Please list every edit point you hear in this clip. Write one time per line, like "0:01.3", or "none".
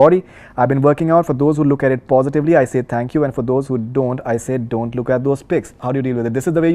0:05.8